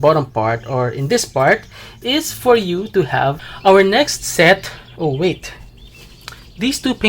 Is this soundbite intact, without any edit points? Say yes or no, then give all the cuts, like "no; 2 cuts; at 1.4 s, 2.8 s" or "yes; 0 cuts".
no; 1 cut; at 3.5 s